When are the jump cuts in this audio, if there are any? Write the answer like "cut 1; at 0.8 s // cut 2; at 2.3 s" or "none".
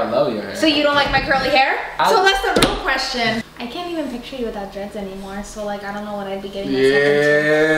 cut 1; at 3.4 s